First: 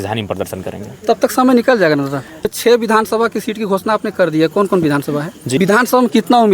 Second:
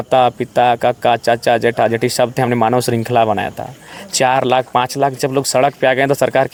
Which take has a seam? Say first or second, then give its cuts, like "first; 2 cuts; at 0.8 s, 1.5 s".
first; 2 cuts; at 2.5 s, 5.6 s